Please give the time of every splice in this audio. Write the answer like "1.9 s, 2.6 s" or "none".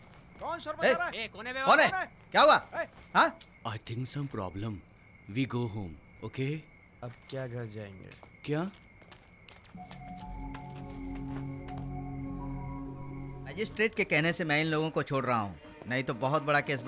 3.5 s, 13.5 s